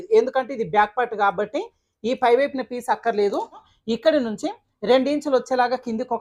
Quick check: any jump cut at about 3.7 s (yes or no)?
yes